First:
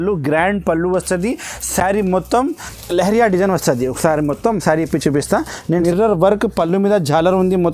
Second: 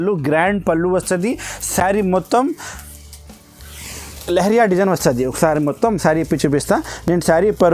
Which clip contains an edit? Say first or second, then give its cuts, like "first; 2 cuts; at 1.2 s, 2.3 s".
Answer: first; 2 cuts; at 2.7 s, 5.7 s